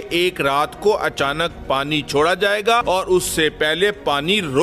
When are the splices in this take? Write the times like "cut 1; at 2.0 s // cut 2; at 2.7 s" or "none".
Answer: cut 1; at 2.8 s